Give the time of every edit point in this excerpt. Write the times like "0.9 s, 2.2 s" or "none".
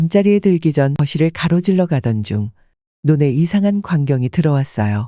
1.0 s